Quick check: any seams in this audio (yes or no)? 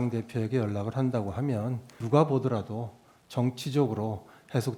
yes